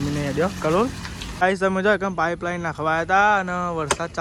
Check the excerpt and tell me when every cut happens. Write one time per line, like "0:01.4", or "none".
0:01.4